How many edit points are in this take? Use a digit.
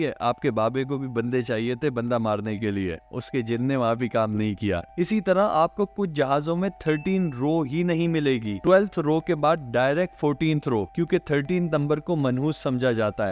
1